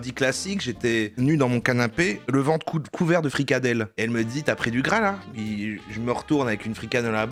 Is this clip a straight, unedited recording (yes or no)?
yes